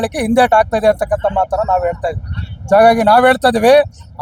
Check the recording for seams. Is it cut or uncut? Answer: uncut